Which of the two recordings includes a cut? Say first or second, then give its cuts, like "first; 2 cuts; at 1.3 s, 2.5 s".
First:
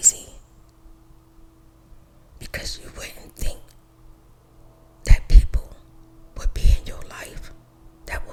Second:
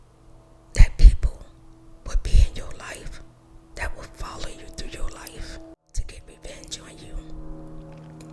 second; 1 cut; at 5.7 s